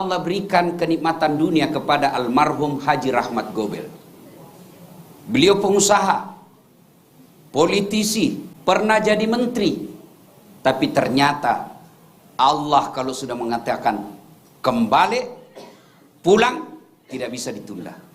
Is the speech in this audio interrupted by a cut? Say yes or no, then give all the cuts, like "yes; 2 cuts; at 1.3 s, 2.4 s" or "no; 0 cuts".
yes; 1 cut; at 8.5 s